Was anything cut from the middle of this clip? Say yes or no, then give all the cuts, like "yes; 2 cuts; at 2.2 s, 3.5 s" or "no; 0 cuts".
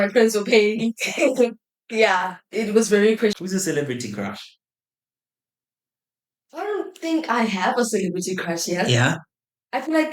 yes; 1 cut; at 3.4 s